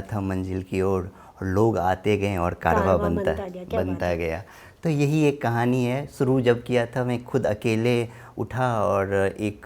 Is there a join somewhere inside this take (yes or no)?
no